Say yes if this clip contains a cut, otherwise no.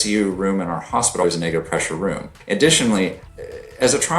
yes